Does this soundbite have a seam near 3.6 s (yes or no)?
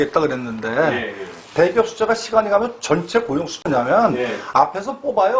yes